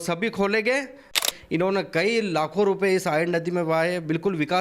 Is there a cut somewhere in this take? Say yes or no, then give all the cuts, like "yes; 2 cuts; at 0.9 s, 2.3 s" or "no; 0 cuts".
yes; 1 cut; at 1.2 s